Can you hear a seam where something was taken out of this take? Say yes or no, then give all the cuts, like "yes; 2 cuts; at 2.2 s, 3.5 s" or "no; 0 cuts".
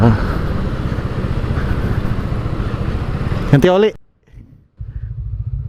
no; 0 cuts